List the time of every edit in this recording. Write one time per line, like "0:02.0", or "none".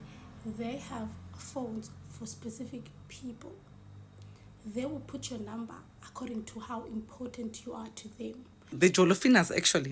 0:08.8